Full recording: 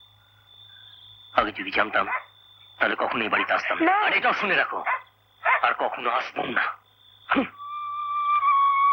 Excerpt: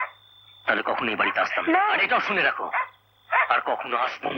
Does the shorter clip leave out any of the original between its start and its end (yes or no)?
no